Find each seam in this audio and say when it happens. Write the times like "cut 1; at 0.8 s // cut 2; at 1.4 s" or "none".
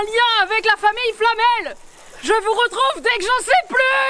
none